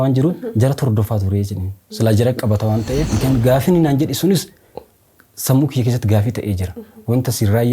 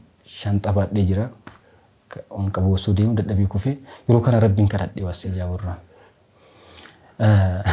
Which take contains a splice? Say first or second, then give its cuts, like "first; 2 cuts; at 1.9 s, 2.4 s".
first; 1 cut; at 3.1 s